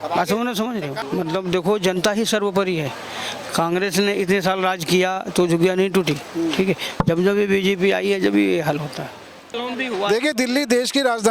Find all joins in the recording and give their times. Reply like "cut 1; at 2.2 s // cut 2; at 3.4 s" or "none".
cut 1; at 1.0 s // cut 2; at 9.5 s